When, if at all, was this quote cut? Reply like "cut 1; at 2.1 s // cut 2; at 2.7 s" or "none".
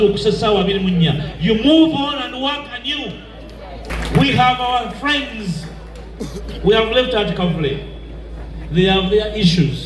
cut 1; at 3.9 s